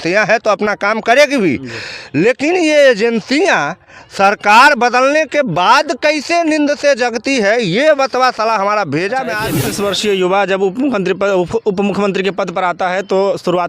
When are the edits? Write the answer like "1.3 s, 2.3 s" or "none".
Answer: 9.5 s